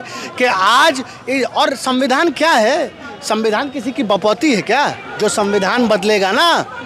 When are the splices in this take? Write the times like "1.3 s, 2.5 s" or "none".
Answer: 5.0 s

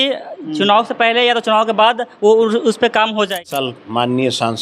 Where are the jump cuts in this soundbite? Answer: 3.5 s

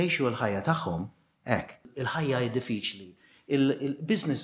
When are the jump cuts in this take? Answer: 1.9 s

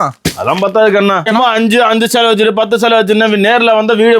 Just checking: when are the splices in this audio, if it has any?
1.3 s

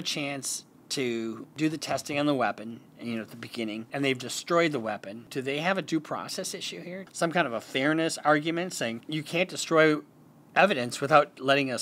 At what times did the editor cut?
1.5 s, 3.9 s, 5.2 s, 7.0 s, 9.1 s

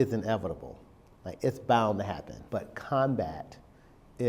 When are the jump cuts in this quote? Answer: 2.3 s

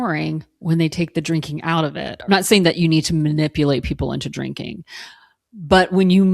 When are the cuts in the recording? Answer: 2.1 s

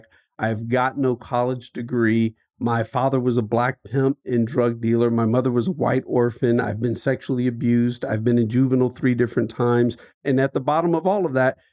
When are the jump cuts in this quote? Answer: 10.1 s

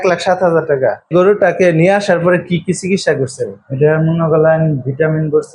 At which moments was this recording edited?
1.1 s

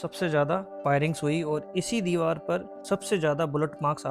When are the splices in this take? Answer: none

